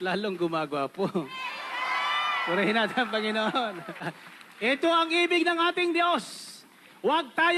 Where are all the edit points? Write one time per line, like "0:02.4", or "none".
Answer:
0:04.1

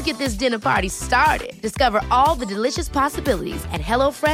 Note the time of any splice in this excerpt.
none

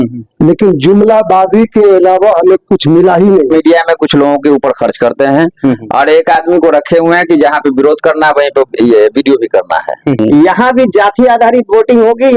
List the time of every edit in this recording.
0:03.5
0:10.2

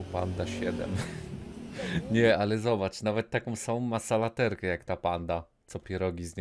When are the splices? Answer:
none

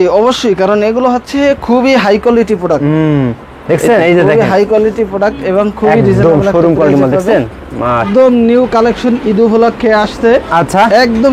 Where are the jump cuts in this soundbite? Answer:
0:08.1

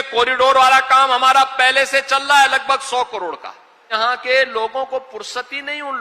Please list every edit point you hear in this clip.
0:03.8

